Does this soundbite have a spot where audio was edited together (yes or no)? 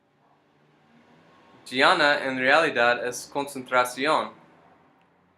yes